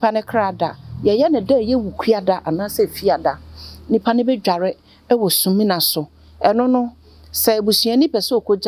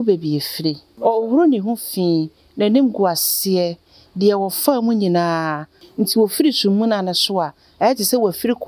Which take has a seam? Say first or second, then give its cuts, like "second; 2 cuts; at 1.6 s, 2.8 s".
second; 2 cuts; at 0.9 s, 5.8 s